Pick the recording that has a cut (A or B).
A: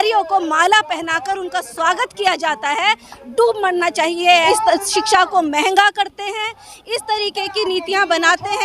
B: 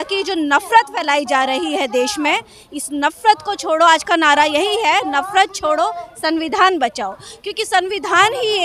A